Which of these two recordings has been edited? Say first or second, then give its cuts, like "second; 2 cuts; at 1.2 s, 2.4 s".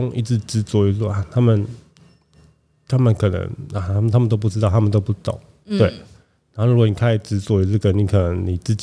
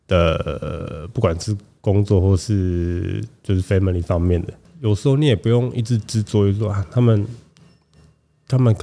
second; 1 cut; at 4.6 s